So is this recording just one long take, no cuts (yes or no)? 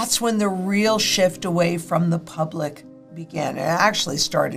yes